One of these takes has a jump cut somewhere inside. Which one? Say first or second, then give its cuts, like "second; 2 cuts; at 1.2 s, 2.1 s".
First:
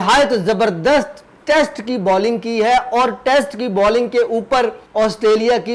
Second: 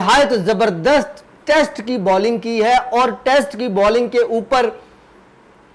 first; 1 cut; at 4.8 s